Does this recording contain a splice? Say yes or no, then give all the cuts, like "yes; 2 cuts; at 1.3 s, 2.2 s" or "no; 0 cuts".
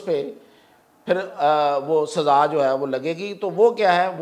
no; 0 cuts